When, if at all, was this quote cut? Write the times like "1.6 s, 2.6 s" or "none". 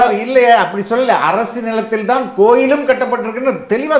none